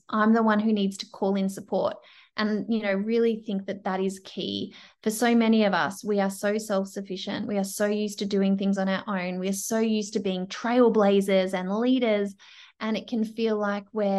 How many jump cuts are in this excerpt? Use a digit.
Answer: 0